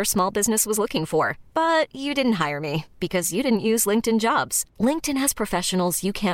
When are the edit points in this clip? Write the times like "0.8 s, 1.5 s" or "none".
none